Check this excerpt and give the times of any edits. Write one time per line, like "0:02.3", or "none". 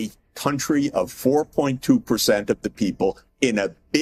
none